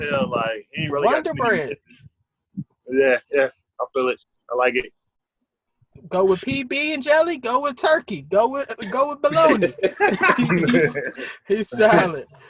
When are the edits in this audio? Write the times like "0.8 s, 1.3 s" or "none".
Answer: none